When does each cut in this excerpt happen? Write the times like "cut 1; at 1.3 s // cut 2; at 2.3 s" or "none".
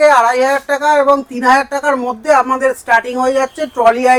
none